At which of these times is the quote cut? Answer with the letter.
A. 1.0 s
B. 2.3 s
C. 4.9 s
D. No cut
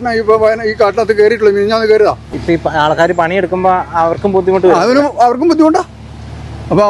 B